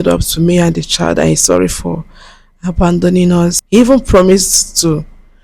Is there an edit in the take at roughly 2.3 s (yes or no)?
no